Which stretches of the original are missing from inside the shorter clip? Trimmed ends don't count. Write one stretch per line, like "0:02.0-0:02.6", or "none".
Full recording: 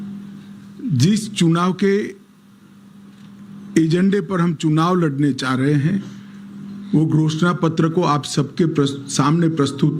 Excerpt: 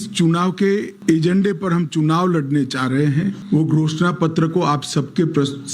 0:02.1-0:03.6
0:06.1-0:06.8